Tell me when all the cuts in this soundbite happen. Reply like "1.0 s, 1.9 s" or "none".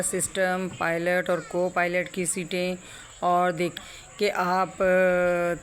3.8 s